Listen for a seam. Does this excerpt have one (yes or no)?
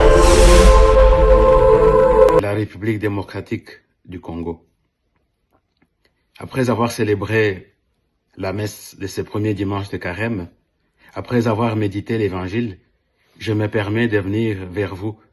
yes